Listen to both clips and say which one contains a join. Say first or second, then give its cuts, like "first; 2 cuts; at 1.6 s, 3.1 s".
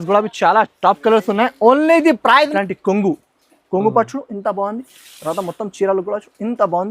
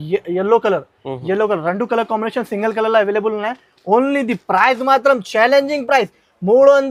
first; 1 cut; at 2.5 s